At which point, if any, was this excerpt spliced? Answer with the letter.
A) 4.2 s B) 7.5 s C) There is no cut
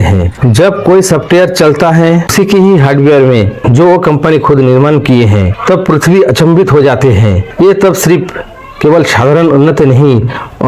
C